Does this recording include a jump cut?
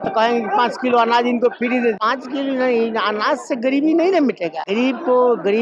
yes; 2 cuts; at 2.0 s, 4.6 s

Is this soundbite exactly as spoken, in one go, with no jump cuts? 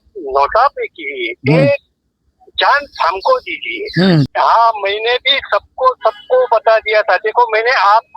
no; 1 cut; at 4.3 s

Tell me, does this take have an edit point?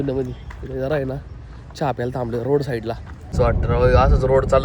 yes; 1 cut; at 3.1 s

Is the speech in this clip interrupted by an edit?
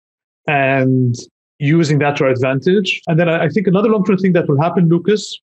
yes; 1 cut; at 3.0 s

